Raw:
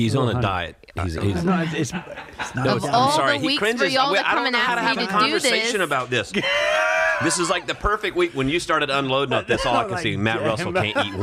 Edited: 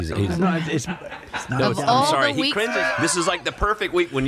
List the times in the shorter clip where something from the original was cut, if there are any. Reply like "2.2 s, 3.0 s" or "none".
2.8 s